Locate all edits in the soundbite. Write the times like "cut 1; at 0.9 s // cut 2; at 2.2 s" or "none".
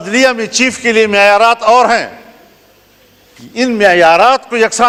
none

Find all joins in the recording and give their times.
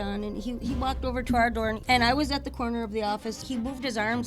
cut 1; at 1.8 s // cut 2; at 3.4 s

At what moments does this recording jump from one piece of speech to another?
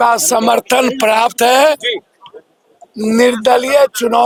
none

